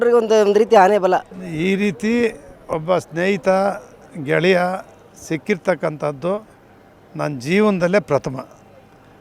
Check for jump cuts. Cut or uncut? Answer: cut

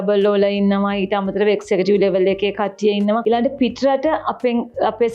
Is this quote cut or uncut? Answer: cut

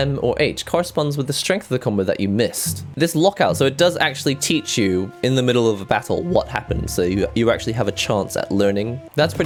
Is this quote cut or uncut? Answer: uncut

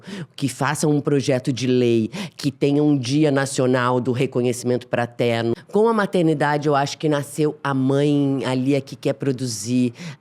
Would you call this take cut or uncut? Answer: cut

